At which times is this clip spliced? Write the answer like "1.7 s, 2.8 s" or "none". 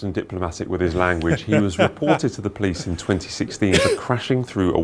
none